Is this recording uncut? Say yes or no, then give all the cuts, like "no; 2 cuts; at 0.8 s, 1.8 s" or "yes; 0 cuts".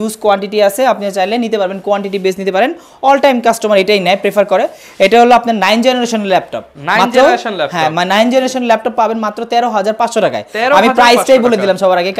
yes; 0 cuts